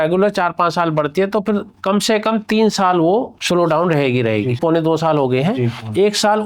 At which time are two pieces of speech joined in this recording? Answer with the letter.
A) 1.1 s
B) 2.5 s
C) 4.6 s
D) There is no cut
C